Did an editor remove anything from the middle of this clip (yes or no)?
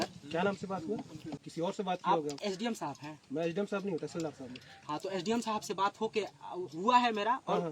yes